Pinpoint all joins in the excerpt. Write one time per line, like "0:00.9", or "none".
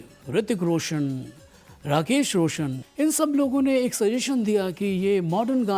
0:02.8